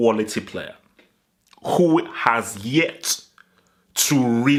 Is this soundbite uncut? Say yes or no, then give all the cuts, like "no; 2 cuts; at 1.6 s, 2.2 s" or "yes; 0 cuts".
yes; 0 cuts